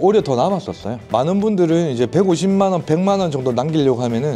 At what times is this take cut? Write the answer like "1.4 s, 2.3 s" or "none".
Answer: 1.1 s